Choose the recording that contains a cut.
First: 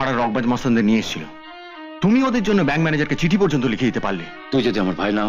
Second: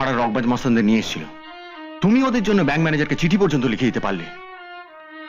first; 1 cut; at 4.3 s

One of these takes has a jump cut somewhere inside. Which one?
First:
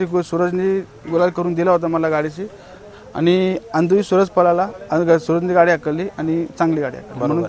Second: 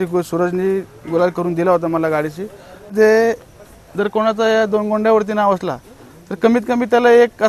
second; 1 cut; at 2.9 s

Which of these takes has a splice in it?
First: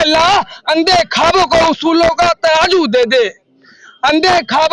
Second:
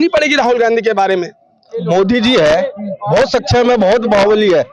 second; 1 cut; at 1.8 s

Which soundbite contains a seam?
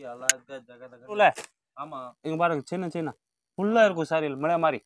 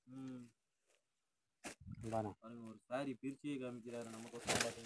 first; 1 cut; at 1.2 s

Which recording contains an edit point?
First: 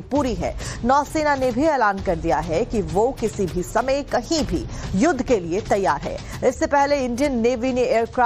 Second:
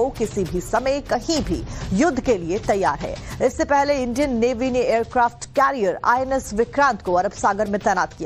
second; 1 cut; at 7.0 s

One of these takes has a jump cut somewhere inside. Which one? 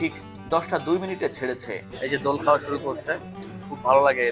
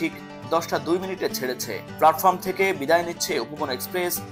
first; 1 cut; at 1.9 s

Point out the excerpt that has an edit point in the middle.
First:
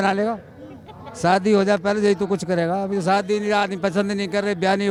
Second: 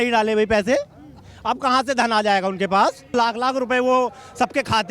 second; 1 cut; at 3.1 s

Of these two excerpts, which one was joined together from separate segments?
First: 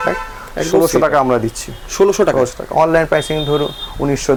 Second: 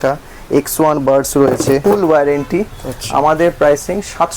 second; 1 cut; at 1.8 s

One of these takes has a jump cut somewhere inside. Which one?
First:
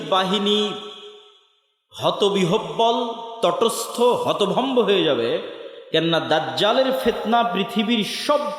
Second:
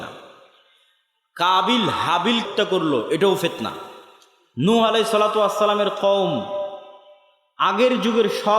second; 1 cut; at 2.5 s

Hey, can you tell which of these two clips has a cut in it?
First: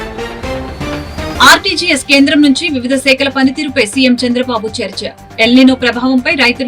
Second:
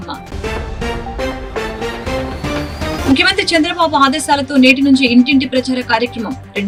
first; 1 cut; at 1.3 s

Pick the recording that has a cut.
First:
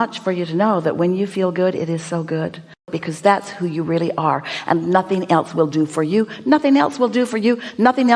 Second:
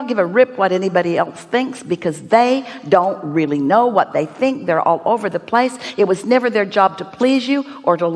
first; 1 cut; at 2.9 s

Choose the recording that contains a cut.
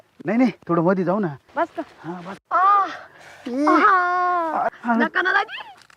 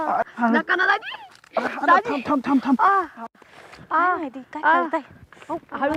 first; 1 cut; at 1.4 s

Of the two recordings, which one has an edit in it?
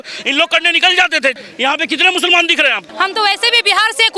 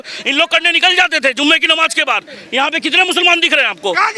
first; 2 cuts; at 1.4 s, 2.8 s

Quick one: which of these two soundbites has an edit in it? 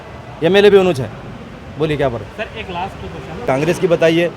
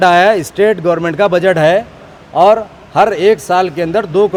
first; 1 cut; at 3.4 s

